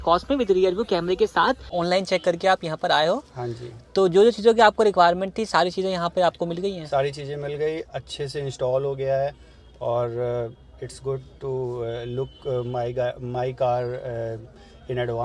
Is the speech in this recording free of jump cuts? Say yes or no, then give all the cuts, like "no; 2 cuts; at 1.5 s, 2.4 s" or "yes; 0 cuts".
no; 1 cut; at 1.7 s